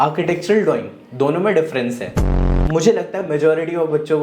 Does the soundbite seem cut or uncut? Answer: cut